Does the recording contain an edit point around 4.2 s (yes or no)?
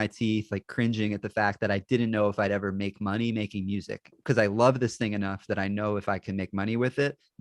yes